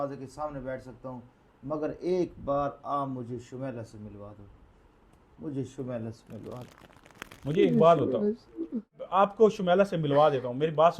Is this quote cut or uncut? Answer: cut